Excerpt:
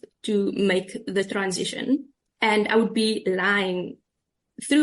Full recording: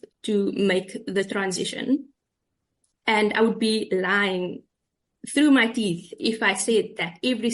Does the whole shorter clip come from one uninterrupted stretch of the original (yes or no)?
no